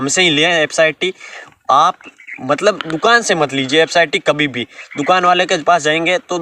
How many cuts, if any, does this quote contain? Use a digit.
0